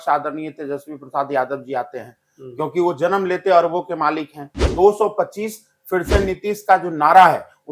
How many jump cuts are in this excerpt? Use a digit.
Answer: 1